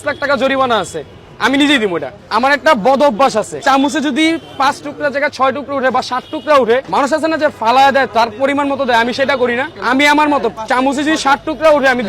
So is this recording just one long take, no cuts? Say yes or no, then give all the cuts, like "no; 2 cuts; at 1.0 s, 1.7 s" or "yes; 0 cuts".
no; 4 cuts; at 2.2 s, 3.6 s, 6.9 s, 9.7 s